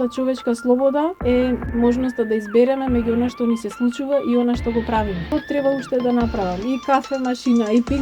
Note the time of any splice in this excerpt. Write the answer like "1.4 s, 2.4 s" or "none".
1.3 s, 5.3 s